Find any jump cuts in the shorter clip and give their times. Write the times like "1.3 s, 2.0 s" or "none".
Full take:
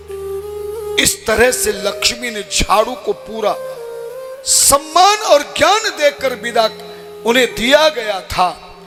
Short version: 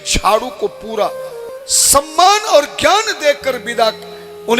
1.5 s